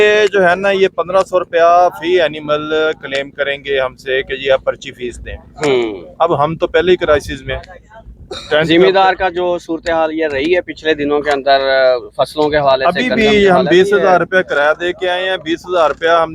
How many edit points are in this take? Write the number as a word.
zero